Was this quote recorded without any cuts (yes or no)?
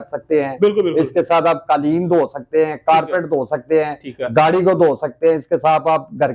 yes